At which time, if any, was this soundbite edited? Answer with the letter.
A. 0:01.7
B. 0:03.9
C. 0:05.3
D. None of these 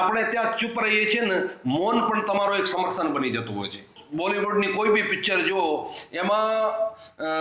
B